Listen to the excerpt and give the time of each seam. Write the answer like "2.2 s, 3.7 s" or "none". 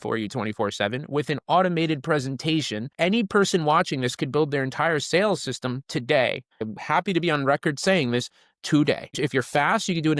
2.9 s, 6.6 s, 9.1 s